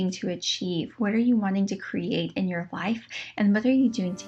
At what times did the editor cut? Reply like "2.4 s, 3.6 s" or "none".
none